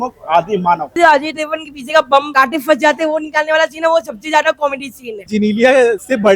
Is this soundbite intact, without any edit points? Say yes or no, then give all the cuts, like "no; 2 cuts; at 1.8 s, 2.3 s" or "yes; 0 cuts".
no; 2 cuts; at 1.0 s, 5.3 s